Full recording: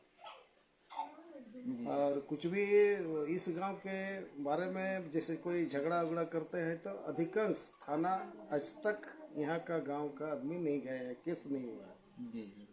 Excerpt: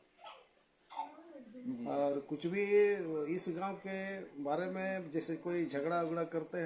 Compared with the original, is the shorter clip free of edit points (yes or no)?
yes